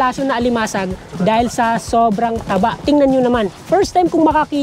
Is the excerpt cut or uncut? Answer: cut